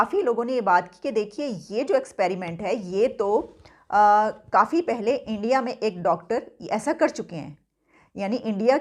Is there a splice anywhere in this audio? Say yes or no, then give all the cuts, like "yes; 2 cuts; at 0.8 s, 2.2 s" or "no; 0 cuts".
no; 0 cuts